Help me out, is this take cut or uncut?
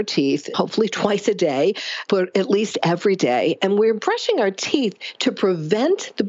uncut